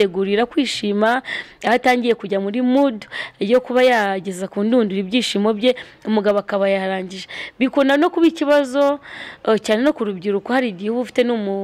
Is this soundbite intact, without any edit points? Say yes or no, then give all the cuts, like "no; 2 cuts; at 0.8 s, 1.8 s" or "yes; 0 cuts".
yes; 0 cuts